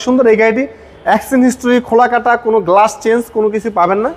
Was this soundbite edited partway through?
no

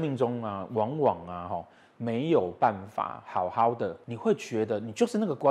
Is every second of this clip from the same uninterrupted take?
no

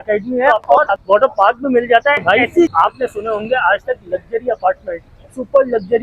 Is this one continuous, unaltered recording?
no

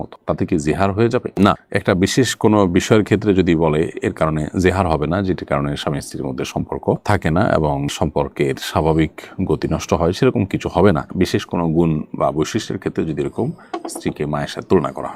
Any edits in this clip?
no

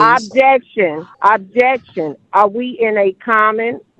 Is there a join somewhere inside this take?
yes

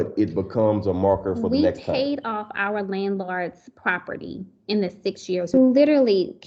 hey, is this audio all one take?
no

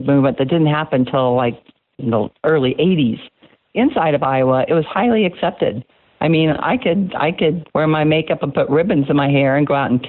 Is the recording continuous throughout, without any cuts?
no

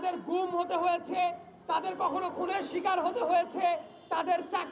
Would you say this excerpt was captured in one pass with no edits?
yes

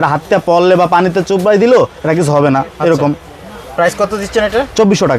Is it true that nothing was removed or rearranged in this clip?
yes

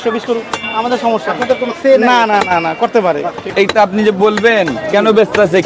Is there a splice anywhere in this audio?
yes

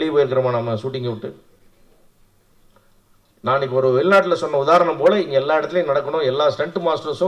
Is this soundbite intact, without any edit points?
yes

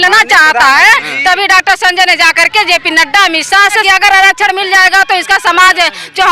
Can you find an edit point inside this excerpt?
yes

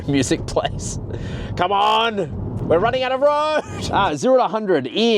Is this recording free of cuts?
no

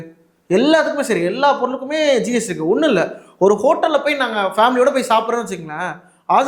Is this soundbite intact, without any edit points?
yes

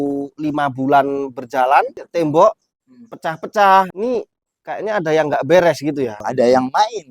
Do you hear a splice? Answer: yes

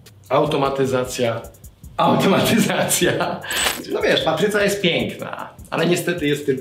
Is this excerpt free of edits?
no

